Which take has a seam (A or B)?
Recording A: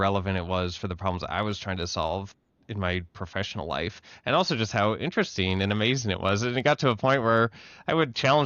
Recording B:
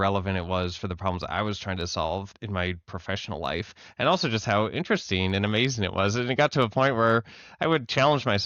B